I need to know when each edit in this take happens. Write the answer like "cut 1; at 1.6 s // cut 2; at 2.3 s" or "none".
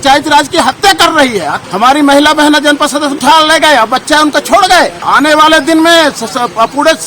cut 1; at 1.5 s // cut 2; at 3.2 s // cut 3; at 5.1 s